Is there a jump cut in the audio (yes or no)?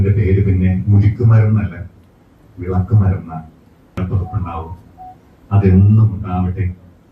yes